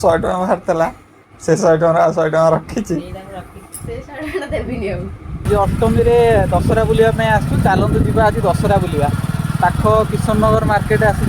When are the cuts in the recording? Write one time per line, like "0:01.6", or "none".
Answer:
0:05.4